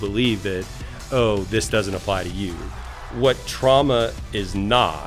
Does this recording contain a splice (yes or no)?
yes